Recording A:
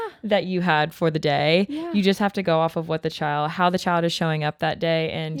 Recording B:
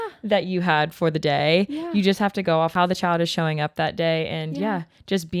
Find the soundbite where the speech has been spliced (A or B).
B